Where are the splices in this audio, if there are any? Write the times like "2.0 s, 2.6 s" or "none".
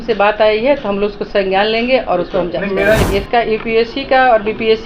3.0 s